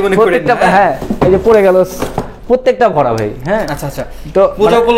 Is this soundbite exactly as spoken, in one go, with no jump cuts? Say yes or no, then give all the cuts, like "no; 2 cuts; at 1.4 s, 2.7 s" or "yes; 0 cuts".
yes; 0 cuts